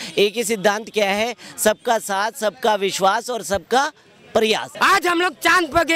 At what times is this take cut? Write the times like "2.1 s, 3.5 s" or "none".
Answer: 4.7 s